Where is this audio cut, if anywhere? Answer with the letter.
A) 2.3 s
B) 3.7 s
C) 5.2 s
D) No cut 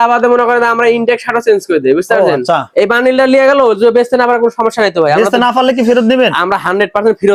D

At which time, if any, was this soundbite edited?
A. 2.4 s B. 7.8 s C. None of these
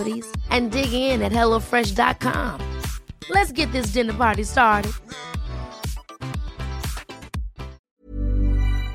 B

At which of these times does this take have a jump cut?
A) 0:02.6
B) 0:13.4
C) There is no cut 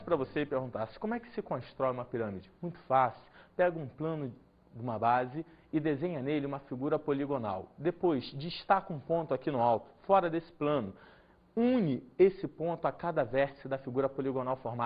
B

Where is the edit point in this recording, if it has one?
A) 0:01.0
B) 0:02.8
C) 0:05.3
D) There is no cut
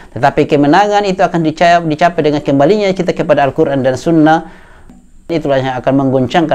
C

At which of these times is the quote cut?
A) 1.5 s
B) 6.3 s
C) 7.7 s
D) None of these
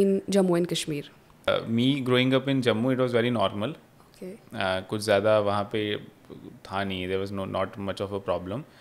A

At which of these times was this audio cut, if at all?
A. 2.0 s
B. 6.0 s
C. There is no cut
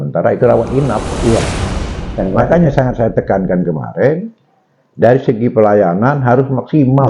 A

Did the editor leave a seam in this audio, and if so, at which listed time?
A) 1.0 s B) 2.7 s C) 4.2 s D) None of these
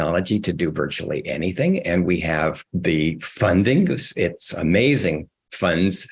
B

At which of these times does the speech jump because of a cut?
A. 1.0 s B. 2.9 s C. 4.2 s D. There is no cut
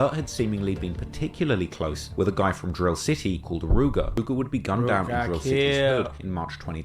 C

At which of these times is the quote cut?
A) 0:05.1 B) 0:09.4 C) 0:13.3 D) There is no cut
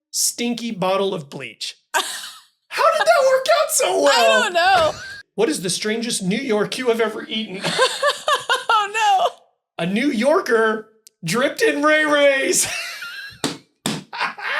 A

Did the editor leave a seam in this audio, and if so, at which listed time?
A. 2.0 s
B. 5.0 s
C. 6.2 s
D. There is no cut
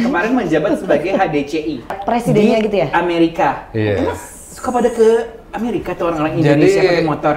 A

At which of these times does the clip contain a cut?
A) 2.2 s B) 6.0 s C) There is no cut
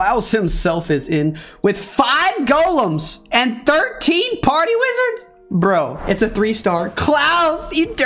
B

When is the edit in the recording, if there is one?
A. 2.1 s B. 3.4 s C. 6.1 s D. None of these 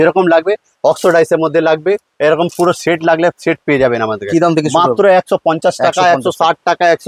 D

